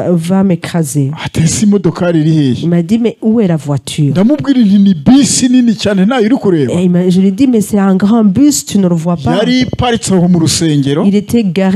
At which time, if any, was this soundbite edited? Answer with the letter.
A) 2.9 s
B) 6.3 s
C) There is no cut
C